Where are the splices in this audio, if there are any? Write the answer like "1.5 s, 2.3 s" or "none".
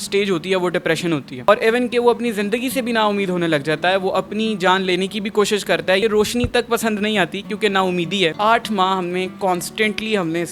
6.0 s, 8.3 s